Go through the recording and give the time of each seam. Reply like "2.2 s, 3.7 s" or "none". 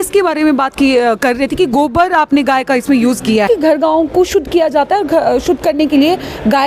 3.5 s